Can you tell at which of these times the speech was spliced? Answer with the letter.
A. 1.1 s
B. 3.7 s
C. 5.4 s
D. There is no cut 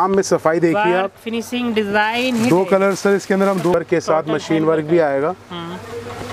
B